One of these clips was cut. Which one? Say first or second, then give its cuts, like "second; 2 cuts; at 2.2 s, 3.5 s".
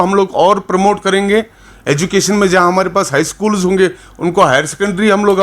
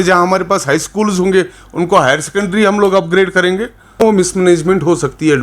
second; 1 cut; at 4.0 s